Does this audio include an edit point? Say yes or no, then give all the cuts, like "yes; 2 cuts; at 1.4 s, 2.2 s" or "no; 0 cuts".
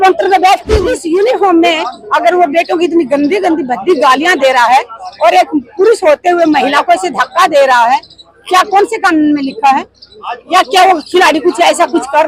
yes; 1 cut; at 1.0 s